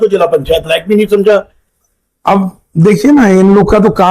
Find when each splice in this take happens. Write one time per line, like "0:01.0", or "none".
0:01.6